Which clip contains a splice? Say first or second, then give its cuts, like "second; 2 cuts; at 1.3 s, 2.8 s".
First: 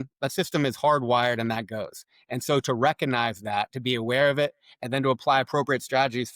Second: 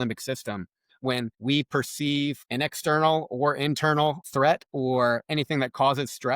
second; 3 cuts; at 1.3 s, 2.4 s, 4.2 s